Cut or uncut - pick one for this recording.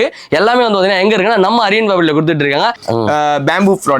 cut